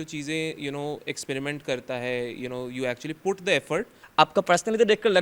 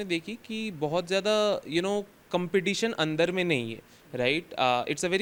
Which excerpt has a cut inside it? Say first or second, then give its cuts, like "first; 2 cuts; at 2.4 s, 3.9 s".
first; 1 cut; at 4.0 s